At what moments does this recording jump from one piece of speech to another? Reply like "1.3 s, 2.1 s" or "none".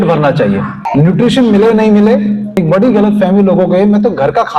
0.8 s, 2.5 s